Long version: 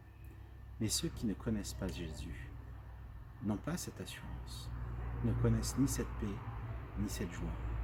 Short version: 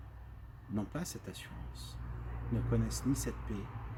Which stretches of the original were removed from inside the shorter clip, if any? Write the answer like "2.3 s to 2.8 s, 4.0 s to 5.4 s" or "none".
none